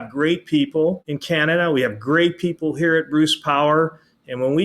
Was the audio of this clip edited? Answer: yes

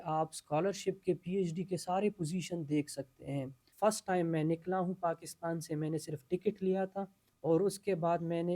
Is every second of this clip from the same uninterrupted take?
no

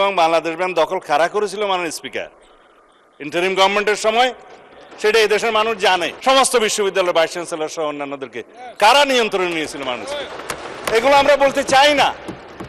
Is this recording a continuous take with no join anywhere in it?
no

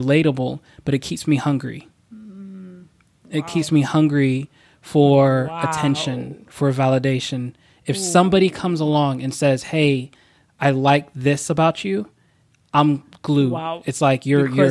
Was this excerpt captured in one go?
yes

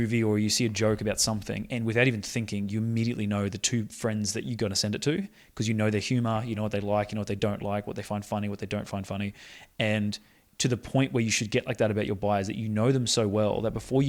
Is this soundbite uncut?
yes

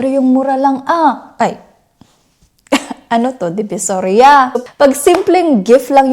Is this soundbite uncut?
no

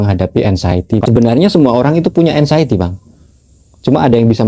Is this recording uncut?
no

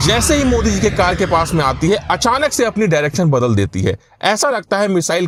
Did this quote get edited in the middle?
no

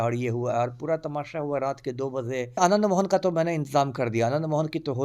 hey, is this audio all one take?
no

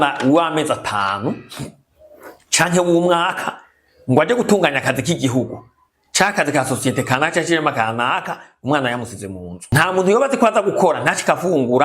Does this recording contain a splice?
yes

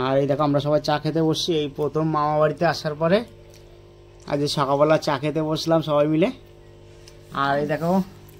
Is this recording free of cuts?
yes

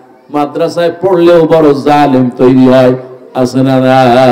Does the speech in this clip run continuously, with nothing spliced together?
yes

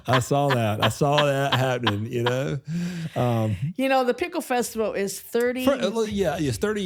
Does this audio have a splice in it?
no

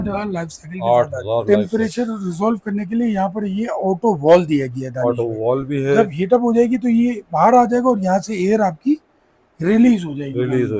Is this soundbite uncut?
no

